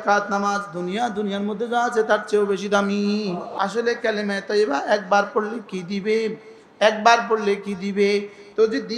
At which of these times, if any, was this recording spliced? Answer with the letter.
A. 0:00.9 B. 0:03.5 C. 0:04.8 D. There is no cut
B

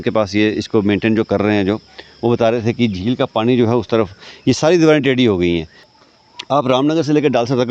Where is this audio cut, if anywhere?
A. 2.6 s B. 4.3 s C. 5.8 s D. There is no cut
C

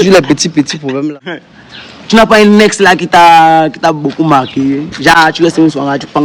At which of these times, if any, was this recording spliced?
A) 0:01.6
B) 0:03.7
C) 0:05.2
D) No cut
A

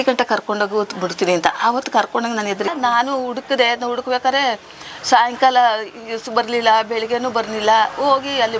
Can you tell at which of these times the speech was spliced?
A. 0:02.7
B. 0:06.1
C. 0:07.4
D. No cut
A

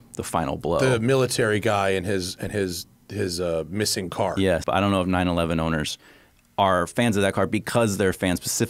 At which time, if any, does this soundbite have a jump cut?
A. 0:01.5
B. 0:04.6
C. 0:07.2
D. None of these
B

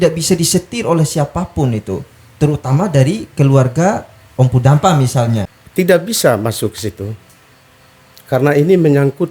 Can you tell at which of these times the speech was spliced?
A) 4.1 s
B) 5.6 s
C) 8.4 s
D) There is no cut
B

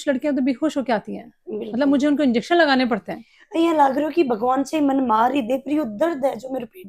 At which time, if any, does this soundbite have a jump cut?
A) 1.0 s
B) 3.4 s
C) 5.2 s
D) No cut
B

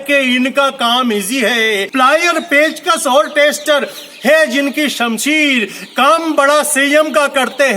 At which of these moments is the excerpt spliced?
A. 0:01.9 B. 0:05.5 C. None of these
A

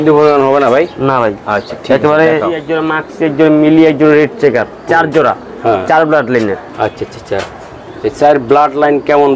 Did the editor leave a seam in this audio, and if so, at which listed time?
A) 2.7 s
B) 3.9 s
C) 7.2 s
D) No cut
A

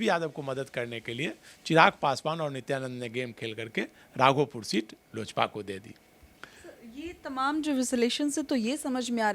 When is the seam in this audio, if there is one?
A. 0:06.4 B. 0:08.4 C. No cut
C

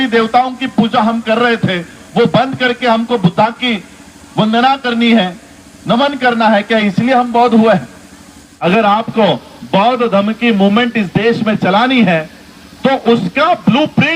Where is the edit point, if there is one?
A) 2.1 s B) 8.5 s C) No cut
B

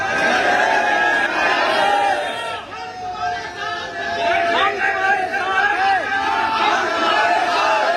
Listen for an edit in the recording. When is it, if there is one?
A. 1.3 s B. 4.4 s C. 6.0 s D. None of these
A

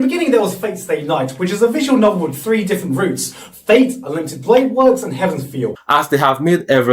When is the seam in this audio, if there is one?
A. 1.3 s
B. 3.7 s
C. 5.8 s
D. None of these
C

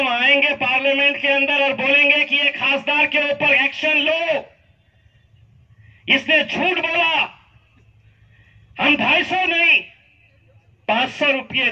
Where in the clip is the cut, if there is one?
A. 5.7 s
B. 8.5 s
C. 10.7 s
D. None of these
D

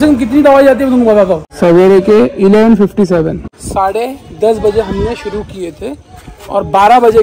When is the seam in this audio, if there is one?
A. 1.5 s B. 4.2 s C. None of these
A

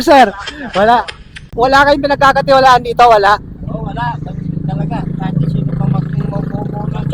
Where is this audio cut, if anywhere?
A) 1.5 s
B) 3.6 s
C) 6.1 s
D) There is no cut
A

